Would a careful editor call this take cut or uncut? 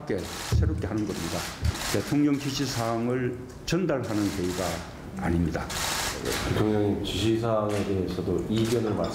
cut